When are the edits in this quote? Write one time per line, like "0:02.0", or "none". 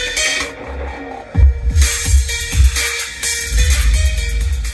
none